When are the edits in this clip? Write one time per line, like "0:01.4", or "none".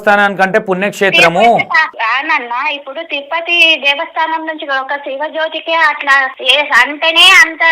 0:01.9
0:06.4